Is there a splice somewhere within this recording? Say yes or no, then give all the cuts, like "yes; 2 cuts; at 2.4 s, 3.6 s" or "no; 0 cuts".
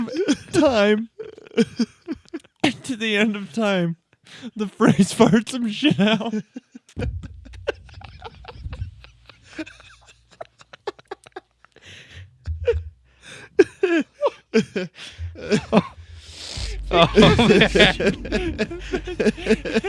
no; 0 cuts